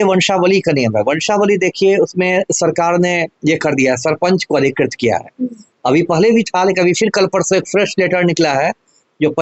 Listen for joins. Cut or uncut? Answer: uncut